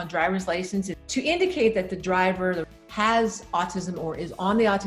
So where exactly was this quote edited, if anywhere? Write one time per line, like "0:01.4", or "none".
0:01.0
0:02.6